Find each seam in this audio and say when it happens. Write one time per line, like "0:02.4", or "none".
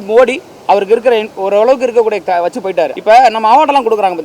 0:03.0